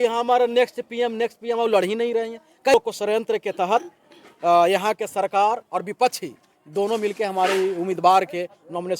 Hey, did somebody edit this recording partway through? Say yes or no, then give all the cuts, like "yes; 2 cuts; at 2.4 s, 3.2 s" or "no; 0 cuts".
yes; 1 cut; at 2.7 s